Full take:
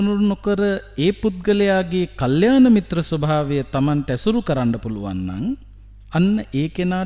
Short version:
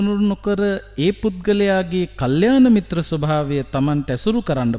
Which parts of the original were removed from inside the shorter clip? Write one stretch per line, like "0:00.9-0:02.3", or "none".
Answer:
none